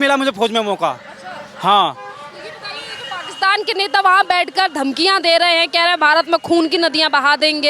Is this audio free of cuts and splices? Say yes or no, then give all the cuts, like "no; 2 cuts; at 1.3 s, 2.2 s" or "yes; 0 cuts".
yes; 0 cuts